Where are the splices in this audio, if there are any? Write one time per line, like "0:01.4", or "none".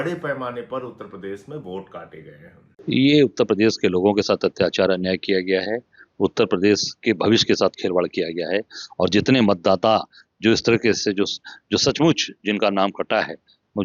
0:02.7